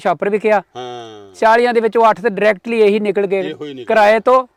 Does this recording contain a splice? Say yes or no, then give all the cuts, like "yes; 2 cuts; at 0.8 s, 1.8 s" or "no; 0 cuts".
no; 0 cuts